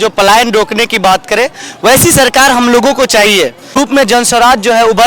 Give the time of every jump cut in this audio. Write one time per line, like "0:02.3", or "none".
0:03.8